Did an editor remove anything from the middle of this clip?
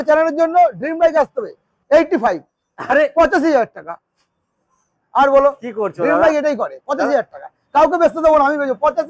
yes; 1 cut; at 1.7 s

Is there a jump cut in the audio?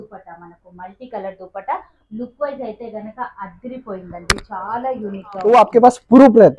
yes; 1 cut; at 5.3 s

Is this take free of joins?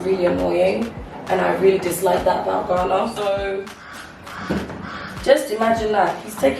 no; 1 cut; at 3.3 s

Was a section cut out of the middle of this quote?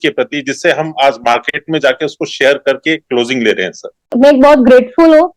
yes; 1 cut; at 4.1 s

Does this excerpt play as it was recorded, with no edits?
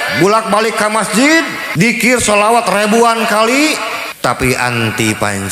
no; 2 cuts; at 1.6 s, 4.0 s

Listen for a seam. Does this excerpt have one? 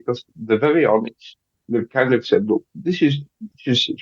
no; 0 cuts

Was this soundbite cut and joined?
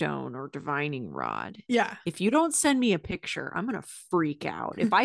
no; 0 cuts

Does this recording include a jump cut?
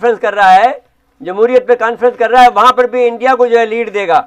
no; 0 cuts

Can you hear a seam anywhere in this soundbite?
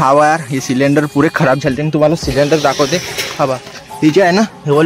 no; 0 cuts

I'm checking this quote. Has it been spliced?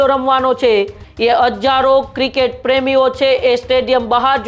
yes; 1 cut; at 1.0 s

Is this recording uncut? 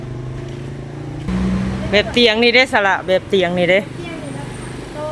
no; 1 cut; at 1.3 s

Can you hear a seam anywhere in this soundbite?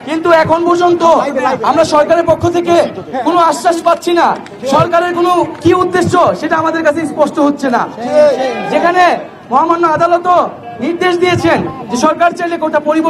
no; 0 cuts

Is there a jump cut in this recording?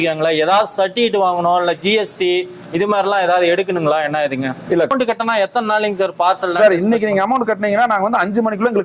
yes; 1 cut; at 4.9 s

